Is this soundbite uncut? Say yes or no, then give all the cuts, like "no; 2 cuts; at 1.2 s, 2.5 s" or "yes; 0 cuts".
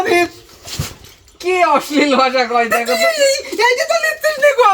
yes; 0 cuts